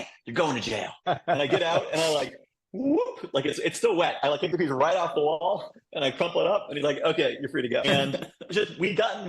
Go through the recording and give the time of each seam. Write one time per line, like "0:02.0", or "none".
0:01.0
0:07.8